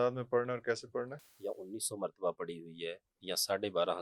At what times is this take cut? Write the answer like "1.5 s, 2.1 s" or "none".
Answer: 1.2 s